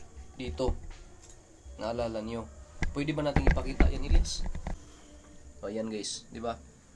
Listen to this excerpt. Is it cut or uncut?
cut